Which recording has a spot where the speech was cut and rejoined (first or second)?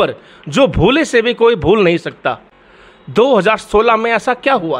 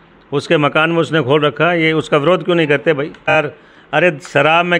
second